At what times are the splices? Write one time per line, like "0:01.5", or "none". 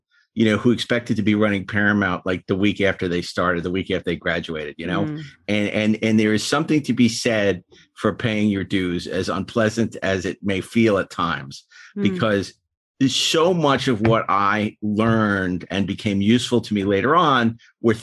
none